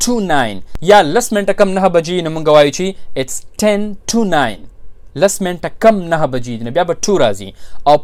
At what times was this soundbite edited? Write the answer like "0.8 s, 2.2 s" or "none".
none